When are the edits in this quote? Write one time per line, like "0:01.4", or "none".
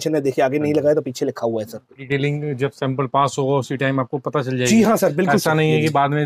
0:02.0